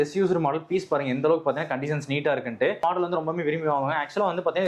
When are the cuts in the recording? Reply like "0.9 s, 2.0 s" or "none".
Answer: 2.8 s